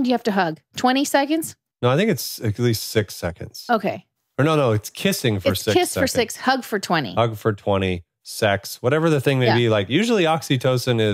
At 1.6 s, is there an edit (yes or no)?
yes